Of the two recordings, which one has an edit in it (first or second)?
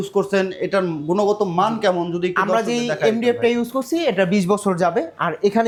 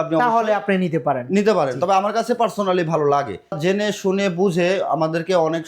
second